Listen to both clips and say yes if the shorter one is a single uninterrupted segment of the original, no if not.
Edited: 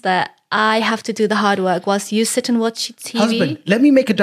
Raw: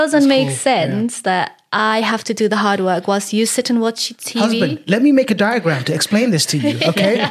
yes